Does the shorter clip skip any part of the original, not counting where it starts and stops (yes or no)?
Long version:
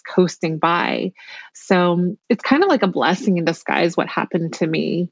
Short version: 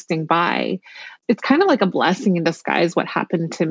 yes